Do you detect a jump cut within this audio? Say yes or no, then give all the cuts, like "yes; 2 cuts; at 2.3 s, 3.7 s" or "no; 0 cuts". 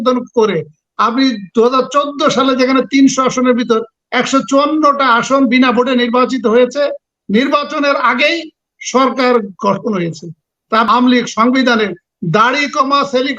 yes; 1 cut; at 10.9 s